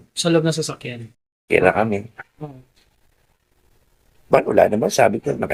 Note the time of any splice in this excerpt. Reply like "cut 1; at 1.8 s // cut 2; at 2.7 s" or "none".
none